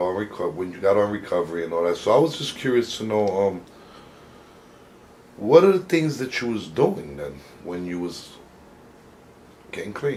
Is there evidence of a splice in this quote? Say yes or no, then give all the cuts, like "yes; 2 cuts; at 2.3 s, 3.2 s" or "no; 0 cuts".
no; 0 cuts